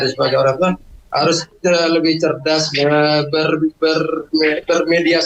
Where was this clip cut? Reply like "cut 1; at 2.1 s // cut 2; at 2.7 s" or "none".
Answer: none